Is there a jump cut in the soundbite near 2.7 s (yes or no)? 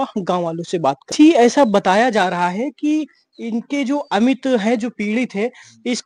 no